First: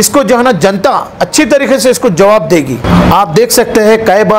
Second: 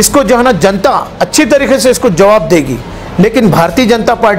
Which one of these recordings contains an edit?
second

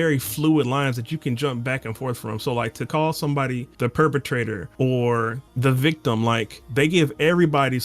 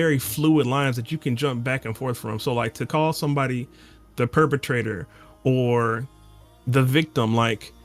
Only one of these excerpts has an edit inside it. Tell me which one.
first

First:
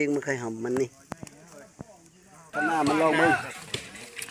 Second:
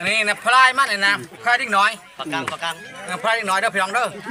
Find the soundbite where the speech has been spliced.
first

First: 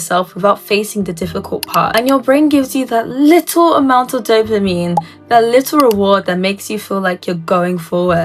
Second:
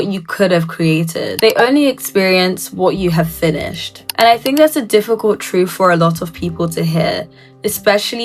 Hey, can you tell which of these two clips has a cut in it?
first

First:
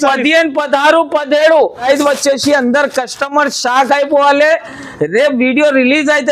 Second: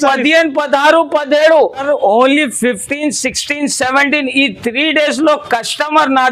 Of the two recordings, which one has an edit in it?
first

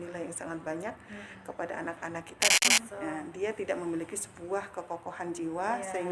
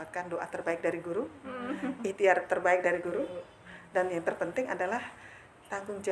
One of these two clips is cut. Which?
first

